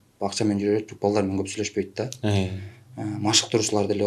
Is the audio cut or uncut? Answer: uncut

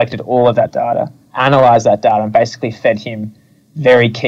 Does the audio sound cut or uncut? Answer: uncut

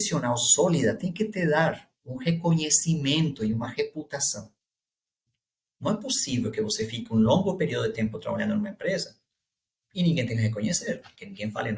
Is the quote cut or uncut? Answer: uncut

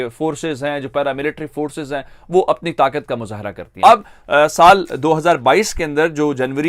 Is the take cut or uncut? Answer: uncut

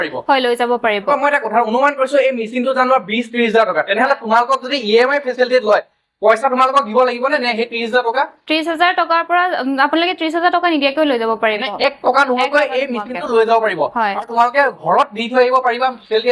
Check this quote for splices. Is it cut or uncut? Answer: uncut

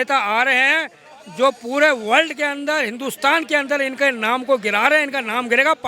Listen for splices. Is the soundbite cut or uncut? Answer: uncut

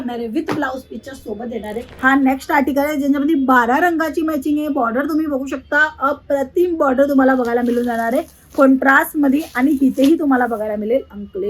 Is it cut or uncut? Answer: cut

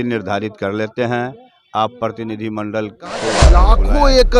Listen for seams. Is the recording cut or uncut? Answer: cut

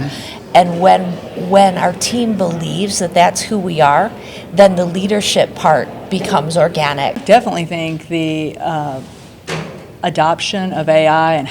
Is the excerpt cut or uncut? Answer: cut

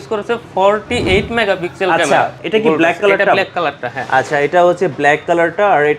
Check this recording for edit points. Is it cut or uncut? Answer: cut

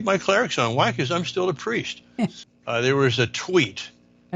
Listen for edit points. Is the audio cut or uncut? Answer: cut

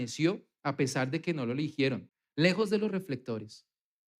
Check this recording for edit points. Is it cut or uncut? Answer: cut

